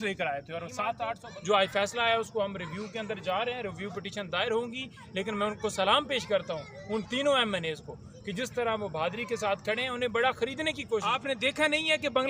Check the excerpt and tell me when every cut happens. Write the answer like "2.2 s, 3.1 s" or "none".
1.2 s, 11.1 s